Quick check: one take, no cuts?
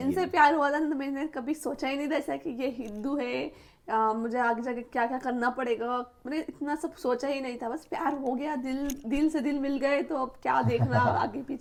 yes; 0 cuts

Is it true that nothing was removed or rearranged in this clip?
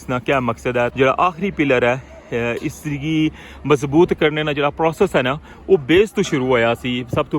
no; 1 cut; at 0.9 s

